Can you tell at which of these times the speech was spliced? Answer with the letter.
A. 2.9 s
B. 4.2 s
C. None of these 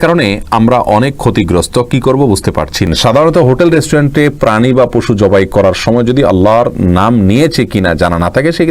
A